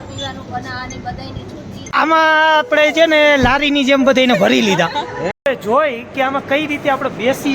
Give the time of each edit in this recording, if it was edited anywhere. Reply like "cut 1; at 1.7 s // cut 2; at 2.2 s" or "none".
cut 1; at 1.8 s // cut 2; at 5.4 s